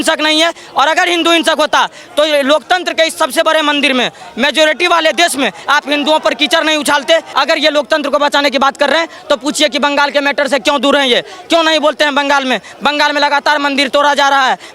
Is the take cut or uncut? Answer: cut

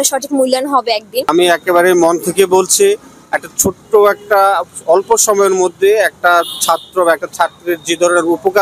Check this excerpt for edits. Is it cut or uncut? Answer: cut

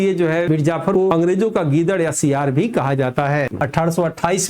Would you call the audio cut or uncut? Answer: cut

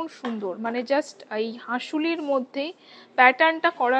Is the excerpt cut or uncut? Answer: uncut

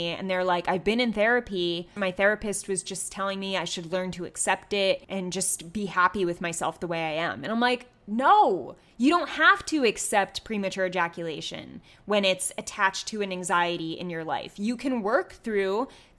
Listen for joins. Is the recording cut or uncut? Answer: cut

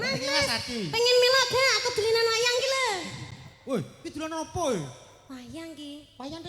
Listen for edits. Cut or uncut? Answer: uncut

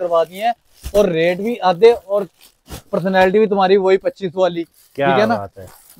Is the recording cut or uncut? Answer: uncut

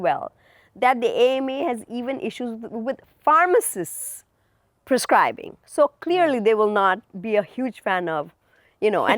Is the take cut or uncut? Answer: uncut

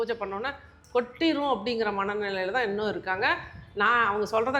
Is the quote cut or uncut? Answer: uncut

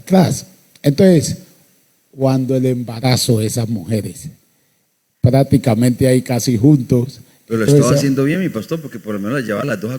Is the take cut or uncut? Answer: uncut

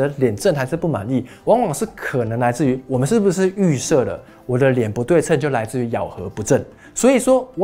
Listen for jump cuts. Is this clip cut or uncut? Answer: uncut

